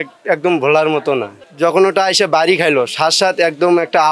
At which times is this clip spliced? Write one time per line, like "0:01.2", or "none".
none